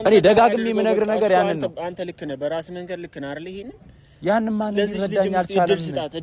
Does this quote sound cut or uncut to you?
uncut